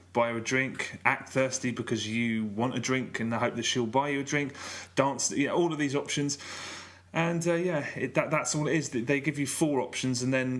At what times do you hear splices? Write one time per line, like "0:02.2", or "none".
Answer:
none